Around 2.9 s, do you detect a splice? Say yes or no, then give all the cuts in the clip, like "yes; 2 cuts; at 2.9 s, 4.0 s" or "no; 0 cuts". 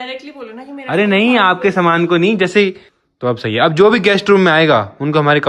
yes; 1 cut; at 2.9 s